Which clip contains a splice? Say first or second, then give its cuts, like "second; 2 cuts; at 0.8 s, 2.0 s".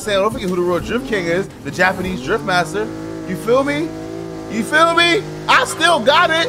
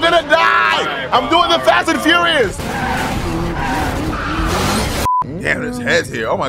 second; 1 cut; at 5.1 s